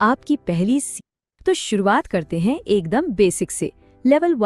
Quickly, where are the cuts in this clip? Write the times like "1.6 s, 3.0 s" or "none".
0.9 s